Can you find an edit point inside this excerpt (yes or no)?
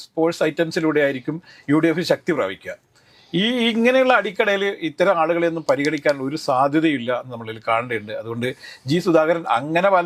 no